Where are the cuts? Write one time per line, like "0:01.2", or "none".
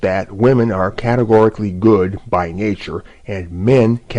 none